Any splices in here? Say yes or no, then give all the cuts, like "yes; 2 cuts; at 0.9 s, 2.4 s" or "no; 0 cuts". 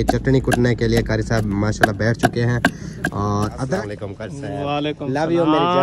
yes; 1 cut; at 3.9 s